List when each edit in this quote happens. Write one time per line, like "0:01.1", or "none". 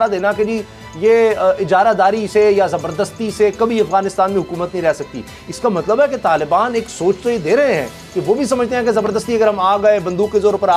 none